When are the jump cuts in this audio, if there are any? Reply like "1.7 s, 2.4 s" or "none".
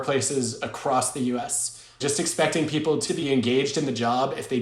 2.0 s, 3.1 s